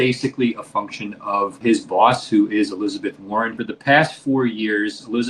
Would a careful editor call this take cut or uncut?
cut